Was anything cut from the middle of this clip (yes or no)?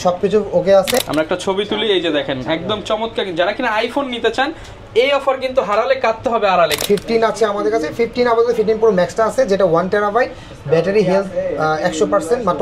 yes